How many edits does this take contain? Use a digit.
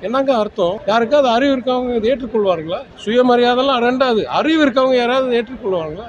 2